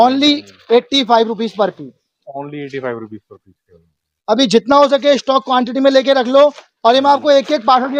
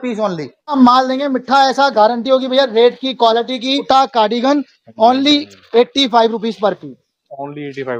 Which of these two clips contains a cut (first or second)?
second